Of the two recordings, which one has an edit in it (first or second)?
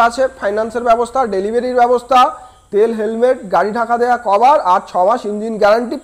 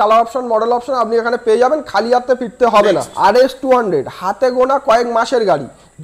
second